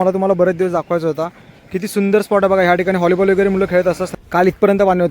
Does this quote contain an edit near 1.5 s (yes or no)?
no